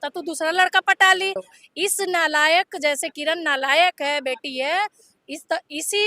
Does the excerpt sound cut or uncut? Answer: cut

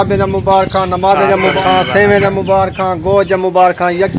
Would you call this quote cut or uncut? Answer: cut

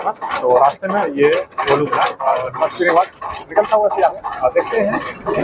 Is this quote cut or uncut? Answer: cut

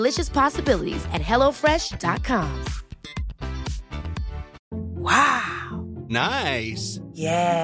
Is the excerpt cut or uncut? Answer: cut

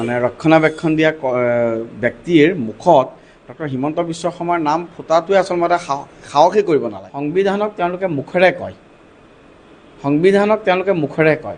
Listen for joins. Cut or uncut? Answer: cut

